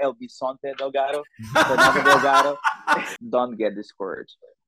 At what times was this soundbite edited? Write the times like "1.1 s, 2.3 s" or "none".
3.1 s